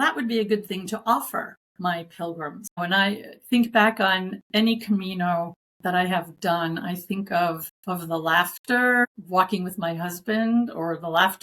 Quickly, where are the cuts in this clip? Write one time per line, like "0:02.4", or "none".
0:01.6
0:02.8
0:04.4
0:05.6
0:07.7
0:09.0